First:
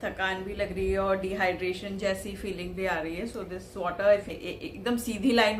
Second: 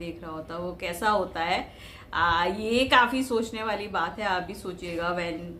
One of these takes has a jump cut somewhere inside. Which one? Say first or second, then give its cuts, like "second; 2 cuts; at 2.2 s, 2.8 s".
first; 1 cut; at 4.4 s